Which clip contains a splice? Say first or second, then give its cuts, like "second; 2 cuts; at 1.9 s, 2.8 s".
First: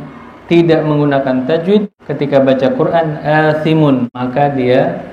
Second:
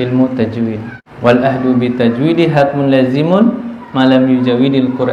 first; 2 cuts; at 2.0 s, 4.1 s